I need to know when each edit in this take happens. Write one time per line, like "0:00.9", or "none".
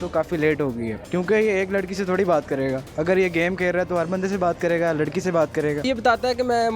0:00.9
0:05.8